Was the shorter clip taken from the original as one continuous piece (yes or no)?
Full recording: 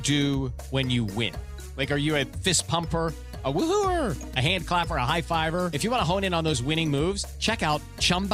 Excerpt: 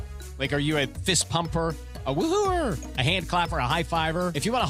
yes